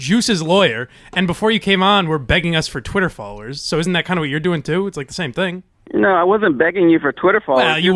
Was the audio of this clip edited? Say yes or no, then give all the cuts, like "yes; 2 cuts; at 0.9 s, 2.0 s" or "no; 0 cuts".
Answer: no; 0 cuts